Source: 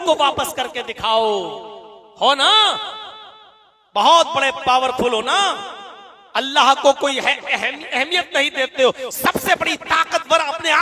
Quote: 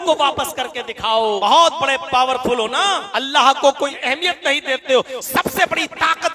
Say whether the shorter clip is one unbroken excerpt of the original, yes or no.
no